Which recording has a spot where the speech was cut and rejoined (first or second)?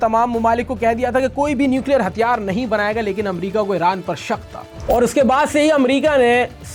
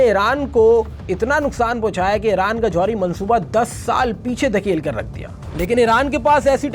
second